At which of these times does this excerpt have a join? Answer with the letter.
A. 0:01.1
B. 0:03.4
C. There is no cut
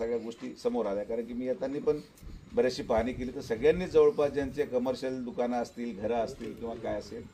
C